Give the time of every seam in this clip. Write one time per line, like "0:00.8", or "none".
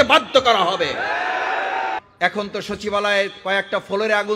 0:02.0